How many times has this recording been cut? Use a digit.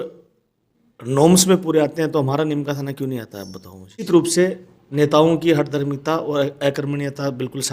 1